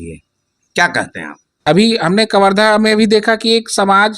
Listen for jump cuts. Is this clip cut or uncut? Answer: cut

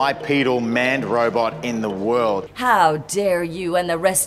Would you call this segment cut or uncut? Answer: cut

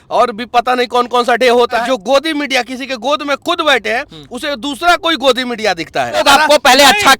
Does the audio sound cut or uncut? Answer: cut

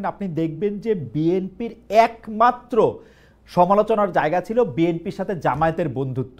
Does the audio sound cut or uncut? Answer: uncut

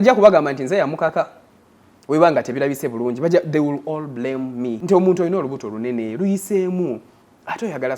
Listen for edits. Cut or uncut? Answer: cut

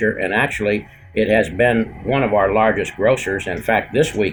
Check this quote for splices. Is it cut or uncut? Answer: uncut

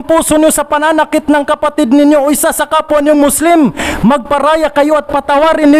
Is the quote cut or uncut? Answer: uncut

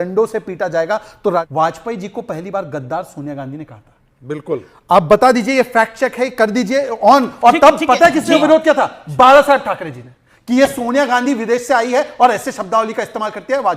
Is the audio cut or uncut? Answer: cut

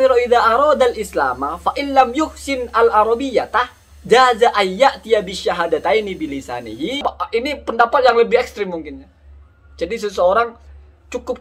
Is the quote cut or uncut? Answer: cut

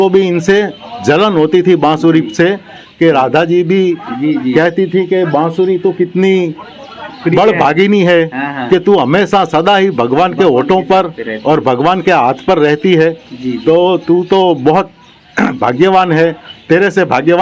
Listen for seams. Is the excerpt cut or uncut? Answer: uncut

